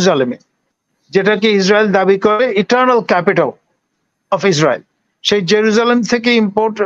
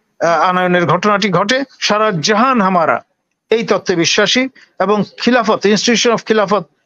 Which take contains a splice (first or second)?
second